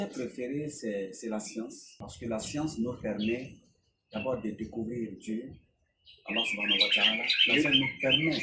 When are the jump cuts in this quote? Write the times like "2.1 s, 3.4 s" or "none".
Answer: 2.0 s

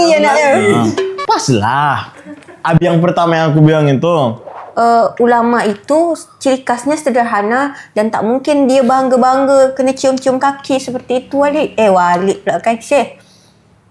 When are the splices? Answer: 4.5 s

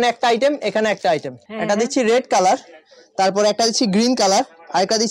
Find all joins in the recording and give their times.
1.4 s

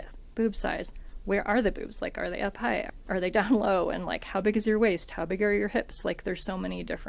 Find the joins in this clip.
2.9 s

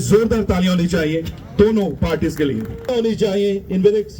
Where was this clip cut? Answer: 2.9 s

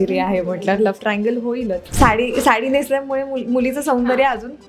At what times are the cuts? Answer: 1.8 s

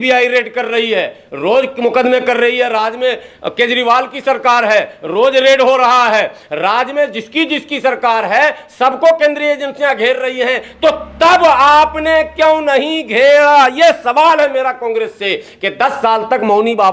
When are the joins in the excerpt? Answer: none

